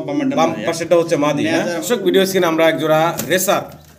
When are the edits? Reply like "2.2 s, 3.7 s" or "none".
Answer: 1.8 s